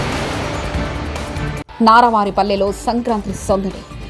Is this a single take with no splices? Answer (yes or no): no